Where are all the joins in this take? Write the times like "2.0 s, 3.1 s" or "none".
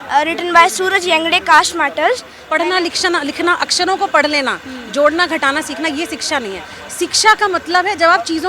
2.3 s

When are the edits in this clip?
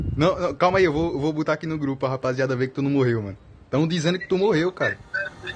none

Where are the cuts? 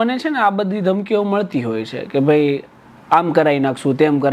none

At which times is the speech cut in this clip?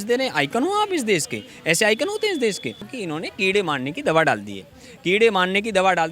2.9 s

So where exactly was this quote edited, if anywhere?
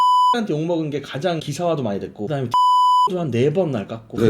2.3 s

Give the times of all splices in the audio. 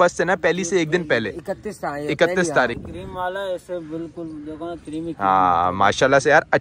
2.8 s

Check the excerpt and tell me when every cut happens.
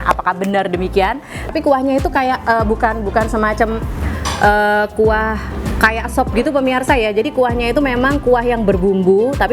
1.5 s

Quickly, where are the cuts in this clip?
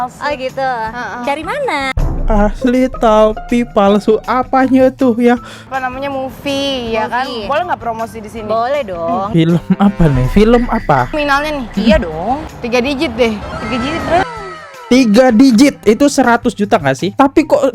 5.6 s, 11.1 s

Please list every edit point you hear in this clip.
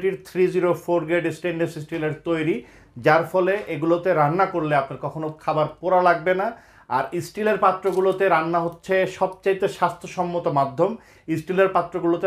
none

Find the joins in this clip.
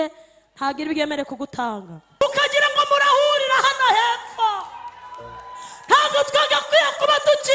2.2 s

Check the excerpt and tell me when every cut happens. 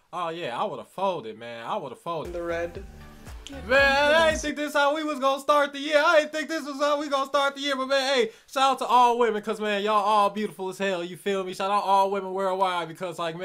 2.3 s

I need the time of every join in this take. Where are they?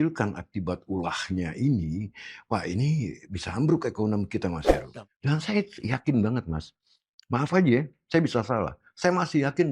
4.8 s

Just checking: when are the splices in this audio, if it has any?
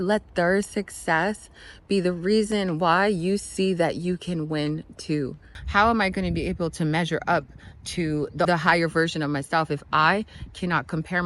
5.5 s, 8.5 s

